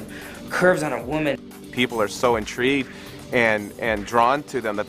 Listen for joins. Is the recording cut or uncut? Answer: cut